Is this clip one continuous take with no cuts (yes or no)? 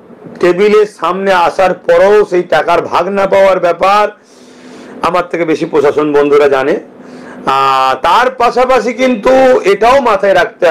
yes